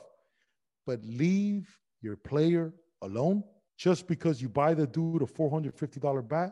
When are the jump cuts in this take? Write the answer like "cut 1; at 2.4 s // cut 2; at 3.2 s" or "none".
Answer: cut 1; at 3.6 s